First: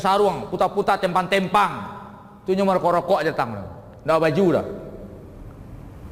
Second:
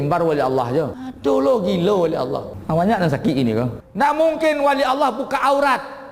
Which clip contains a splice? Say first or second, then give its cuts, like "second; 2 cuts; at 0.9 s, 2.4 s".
second; 3 cuts; at 1.0 s, 2.5 s, 3.8 s